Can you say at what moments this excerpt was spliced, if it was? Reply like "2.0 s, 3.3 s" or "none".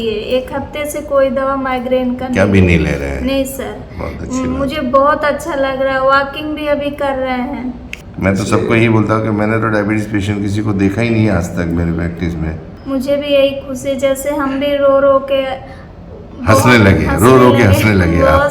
7.9 s, 12.7 s

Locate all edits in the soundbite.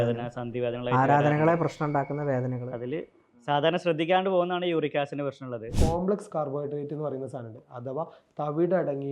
5.7 s

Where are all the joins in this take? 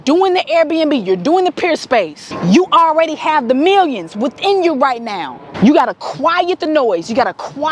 2.2 s, 5.5 s

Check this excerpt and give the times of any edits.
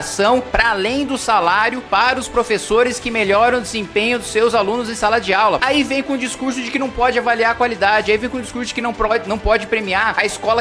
5.6 s

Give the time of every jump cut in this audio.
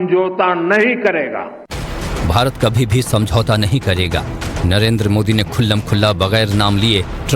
1.5 s, 2.7 s

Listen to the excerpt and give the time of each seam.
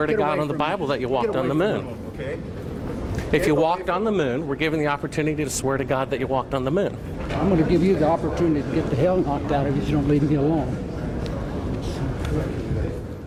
none

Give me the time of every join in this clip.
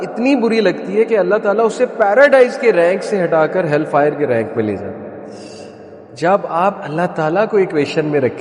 6.0 s

